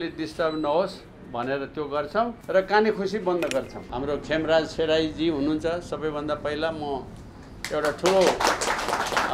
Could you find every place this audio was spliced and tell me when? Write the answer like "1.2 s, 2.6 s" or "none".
2.4 s, 3.8 s